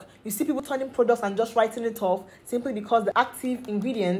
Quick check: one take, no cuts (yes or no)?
no